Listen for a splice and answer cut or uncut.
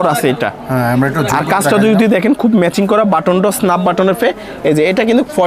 uncut